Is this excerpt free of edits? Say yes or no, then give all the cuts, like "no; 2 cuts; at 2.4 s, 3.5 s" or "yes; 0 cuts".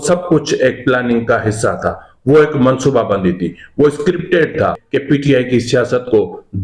no; 1 cut; at 4.8 s